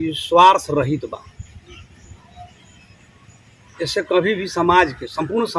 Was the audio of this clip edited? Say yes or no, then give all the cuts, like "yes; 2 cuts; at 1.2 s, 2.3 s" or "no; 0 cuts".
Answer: no; 0 cuts